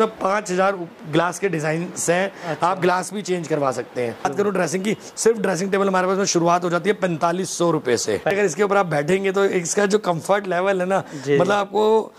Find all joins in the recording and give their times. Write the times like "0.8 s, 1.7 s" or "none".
4.2 s, 8.3 s